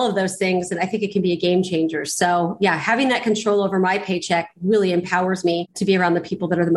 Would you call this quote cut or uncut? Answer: cut